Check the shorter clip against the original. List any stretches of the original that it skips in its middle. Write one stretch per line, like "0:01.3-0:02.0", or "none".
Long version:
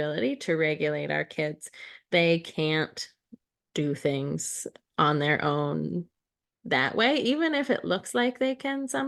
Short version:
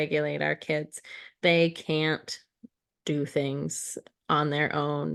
none